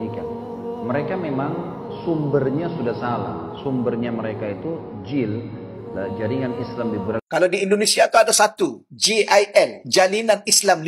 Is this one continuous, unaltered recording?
no; 1 cut; at 7.2 s

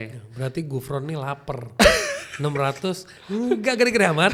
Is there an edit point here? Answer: no; 0 cuts

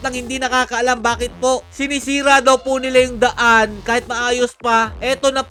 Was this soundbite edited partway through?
no; 0 cuts

